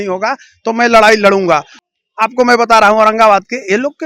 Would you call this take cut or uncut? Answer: cut